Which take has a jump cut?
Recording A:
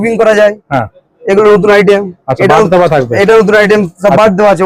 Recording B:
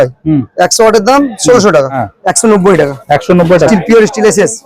B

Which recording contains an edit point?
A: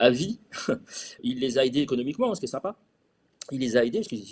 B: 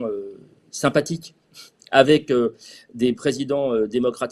A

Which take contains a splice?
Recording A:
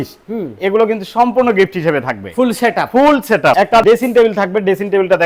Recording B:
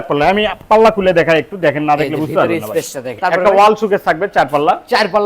B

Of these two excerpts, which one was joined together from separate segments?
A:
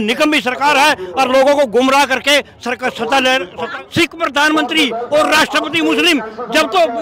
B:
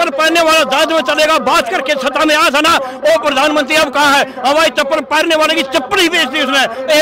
A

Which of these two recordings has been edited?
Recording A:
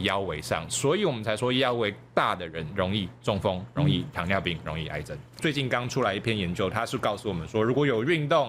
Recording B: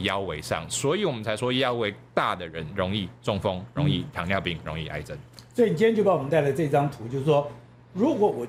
A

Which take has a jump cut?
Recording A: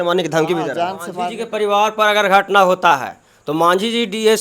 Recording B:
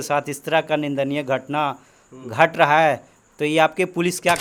A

